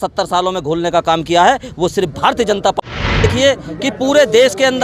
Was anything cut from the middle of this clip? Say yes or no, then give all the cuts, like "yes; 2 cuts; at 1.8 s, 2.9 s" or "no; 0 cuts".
yes; 1 cut; at 3.2 s